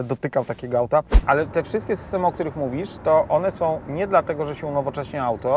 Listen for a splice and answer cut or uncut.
cut